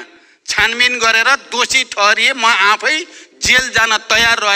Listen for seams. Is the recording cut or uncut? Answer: uncut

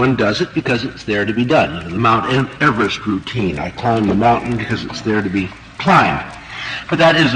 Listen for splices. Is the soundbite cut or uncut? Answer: uncut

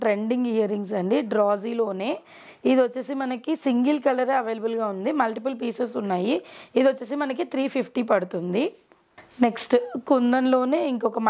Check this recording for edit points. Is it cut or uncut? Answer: uncut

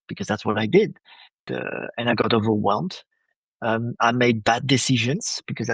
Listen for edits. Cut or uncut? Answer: cut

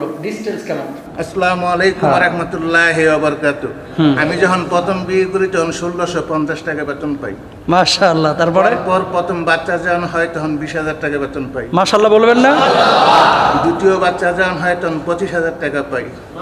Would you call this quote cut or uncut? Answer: cut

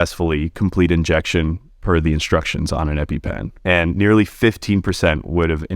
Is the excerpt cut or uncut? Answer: cut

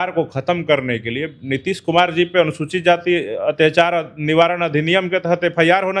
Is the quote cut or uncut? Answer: uncut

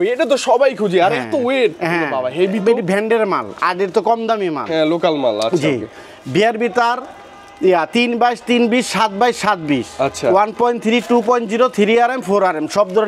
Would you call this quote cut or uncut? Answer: uncut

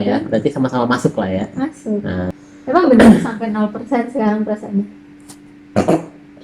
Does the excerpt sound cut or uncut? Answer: cut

